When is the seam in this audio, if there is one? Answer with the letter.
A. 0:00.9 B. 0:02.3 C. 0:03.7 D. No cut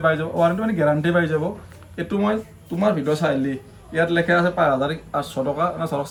D